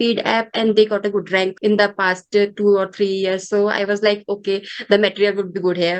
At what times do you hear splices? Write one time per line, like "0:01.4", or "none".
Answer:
0:01.5